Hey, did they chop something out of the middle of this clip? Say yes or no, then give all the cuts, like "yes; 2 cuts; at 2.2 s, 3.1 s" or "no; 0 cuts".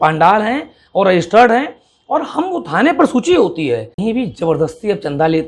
yes; 1 cut; at 3.9 s